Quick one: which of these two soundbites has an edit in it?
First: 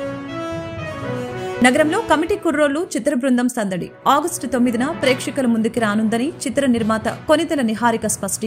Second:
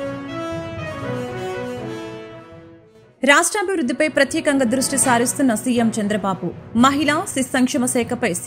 first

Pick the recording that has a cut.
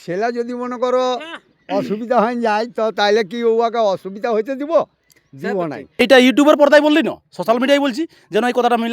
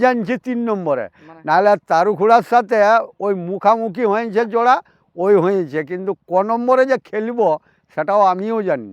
first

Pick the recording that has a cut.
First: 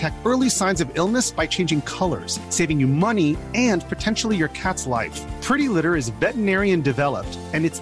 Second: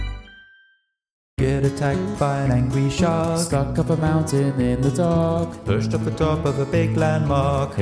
second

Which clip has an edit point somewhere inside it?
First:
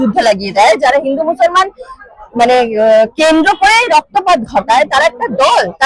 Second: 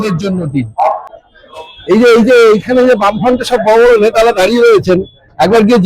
second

